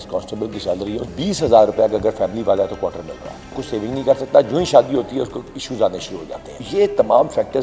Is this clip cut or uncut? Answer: cut